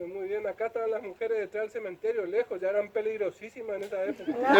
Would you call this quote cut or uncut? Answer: uncut